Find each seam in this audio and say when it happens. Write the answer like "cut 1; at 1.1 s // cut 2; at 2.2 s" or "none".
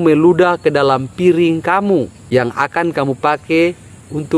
cut 1; at 2.2 s